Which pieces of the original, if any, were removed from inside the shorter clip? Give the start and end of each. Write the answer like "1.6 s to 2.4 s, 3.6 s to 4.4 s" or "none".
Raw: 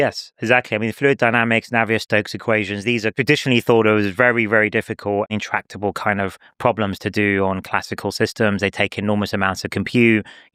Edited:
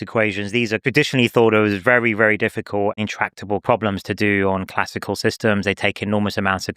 5.9 s to 6.6 s